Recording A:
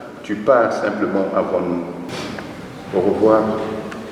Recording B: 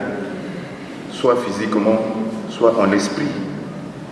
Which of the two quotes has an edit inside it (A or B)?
A